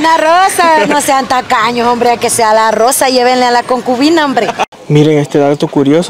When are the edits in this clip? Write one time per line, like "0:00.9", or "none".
0:04.7